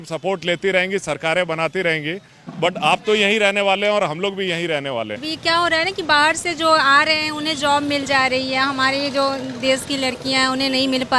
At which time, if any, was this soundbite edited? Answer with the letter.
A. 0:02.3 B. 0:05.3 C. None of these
B